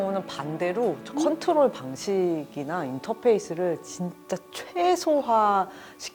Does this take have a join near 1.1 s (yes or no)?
no